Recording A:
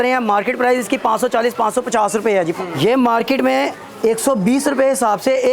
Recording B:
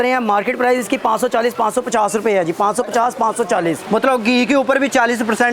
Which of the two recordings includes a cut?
A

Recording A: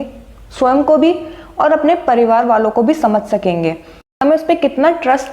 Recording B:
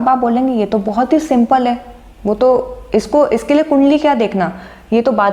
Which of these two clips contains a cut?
A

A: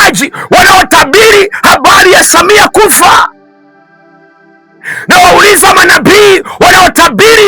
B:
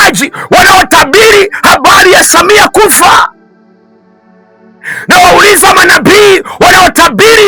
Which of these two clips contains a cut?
A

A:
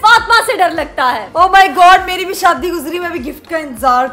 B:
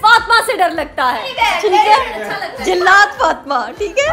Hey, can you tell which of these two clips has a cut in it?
A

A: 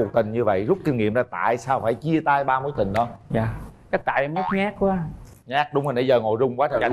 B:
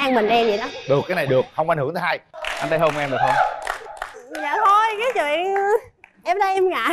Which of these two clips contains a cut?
B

